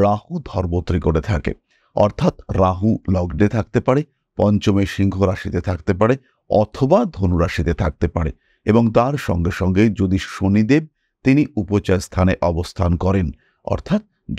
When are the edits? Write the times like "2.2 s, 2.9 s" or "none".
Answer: none